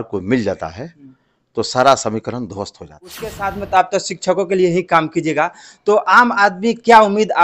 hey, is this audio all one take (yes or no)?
no